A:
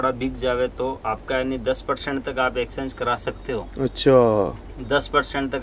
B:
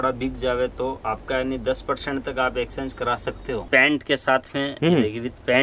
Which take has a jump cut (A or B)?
B